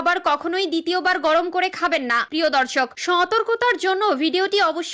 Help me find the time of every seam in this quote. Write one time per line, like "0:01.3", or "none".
0:02.3